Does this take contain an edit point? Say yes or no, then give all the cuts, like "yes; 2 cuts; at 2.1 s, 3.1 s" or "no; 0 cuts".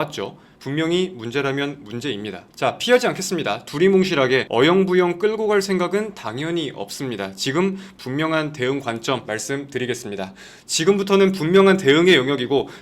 yes; 1 cut; at 10.5 s